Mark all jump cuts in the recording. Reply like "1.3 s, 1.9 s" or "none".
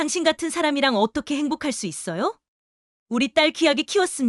none

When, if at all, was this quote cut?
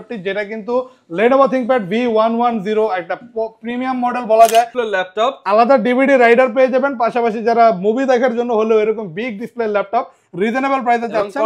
4.7 s

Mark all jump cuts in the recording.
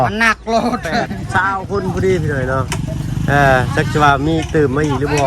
1.2 s

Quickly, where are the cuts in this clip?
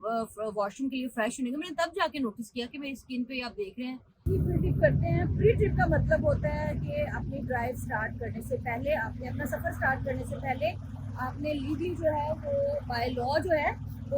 4.1 s

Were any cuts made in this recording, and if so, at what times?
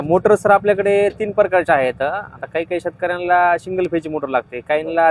none

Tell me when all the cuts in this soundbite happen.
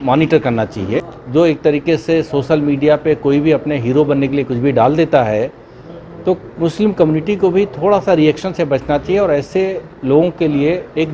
1.2 s

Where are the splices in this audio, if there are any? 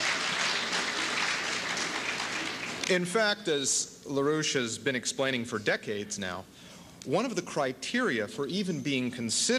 3.1 s

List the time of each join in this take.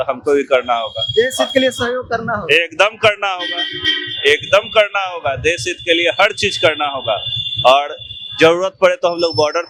none

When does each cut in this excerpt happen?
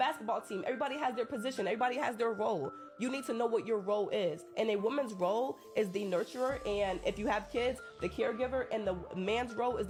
none

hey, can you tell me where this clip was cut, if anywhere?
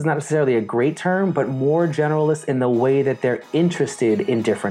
none

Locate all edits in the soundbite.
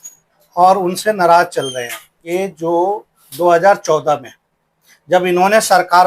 2.1 s

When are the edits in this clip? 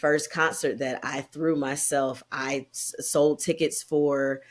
none

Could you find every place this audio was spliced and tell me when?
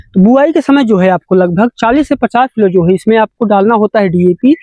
none

